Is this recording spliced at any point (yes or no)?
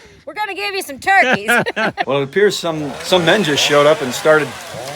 yes